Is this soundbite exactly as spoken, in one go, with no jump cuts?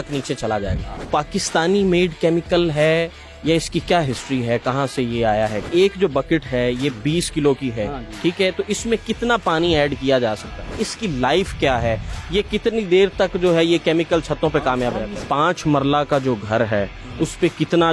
no; 4 cuts; at 1.0 s, 5.7 s, 10.9 s, 15.2 s

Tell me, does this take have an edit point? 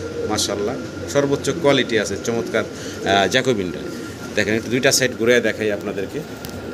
no; 0 cuts

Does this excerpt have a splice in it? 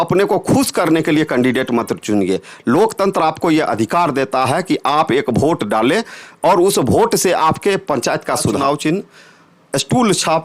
yes; 1 cut; at 8.6 s

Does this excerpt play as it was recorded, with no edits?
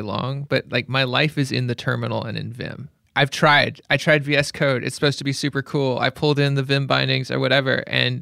yes; 0 cuts

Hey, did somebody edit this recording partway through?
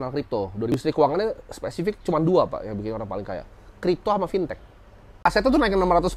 yes; 2 cuts; at 0.8 s, 5.2 s

